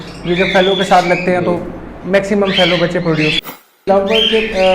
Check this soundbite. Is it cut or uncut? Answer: cut